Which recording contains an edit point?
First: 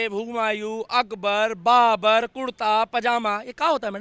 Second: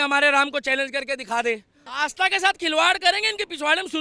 second; 1 cut; at 1.8 s

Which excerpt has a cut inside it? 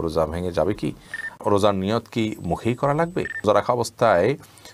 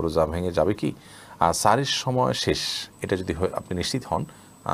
first; 2 cuts; at 1.3 s, 3.4 s

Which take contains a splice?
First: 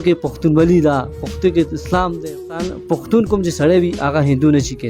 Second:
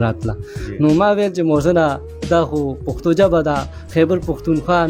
first; 1 cut; at 2.7 s

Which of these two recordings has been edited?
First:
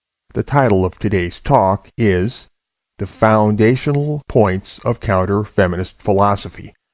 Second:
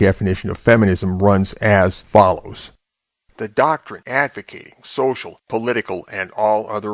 first; 1 cut; at 5.4 s

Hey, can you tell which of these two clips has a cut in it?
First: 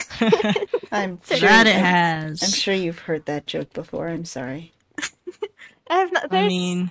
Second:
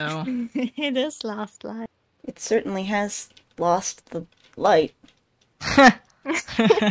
second; 1 cut; at 2.0 s

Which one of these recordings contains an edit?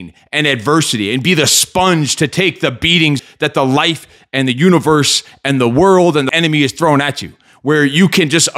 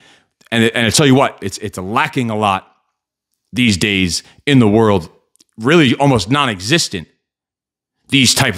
first; 2 cuts; at 3.2 s, 6.3 s

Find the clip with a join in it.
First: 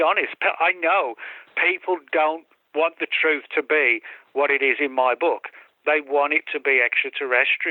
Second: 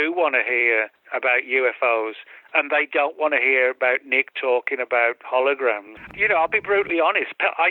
second; 2 cuts; at 1.0 s, 6.1 s

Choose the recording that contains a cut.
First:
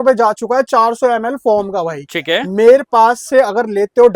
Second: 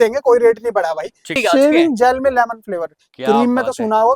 second; 1 cut; at 1.4 s

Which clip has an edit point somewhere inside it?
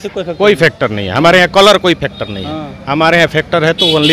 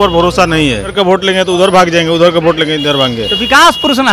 second; 1 cut; at 0.9 s

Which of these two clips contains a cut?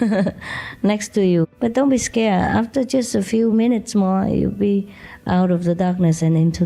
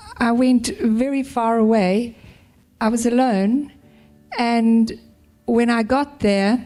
first; 1 cut; at 1.5 s

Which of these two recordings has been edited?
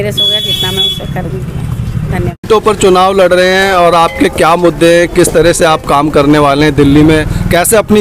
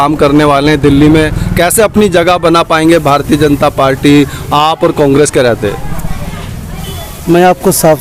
first; 1 cut; at 2.5 s

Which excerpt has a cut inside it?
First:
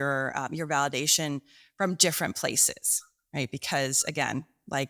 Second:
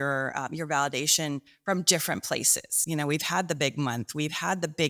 second; 2 cuts; at 1.5 s, 2.8 s

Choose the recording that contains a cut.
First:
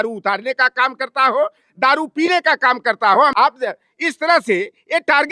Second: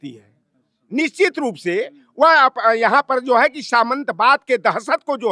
first; 1 cut; at 3.3 s

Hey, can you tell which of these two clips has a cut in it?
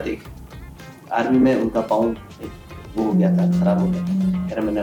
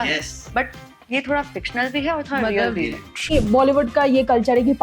second; 1 cut; at 3.3 s

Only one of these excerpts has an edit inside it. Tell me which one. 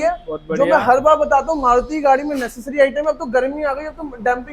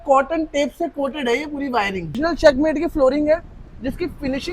second; 1 cut; at 2.2 s

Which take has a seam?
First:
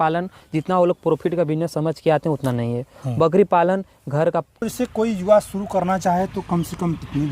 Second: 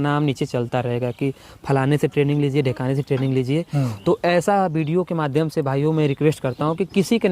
first; 1 cut; at 4.6 s

